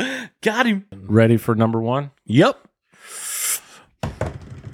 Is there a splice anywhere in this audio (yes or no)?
yes